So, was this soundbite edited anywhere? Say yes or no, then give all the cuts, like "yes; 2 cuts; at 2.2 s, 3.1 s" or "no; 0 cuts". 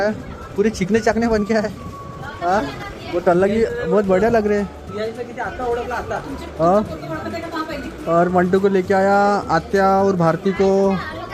no; 0 cuts